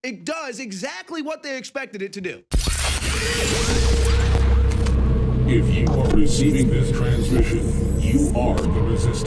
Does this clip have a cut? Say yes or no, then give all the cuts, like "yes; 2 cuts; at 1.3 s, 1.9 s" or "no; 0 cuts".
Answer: yes; 1 cut; at 2.4 s